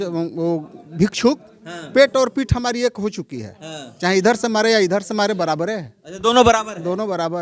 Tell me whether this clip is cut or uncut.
uncut